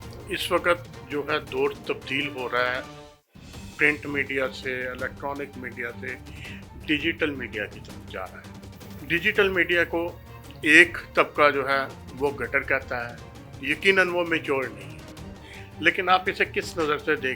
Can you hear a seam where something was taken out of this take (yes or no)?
yes